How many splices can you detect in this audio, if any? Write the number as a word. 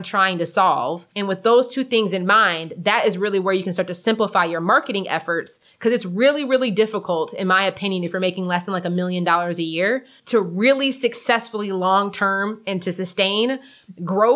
one